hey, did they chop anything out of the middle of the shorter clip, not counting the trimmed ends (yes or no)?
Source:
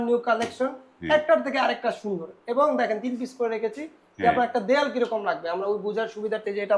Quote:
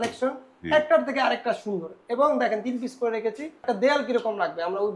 yes